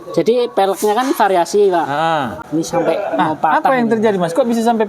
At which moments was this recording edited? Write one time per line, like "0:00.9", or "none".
0:02.4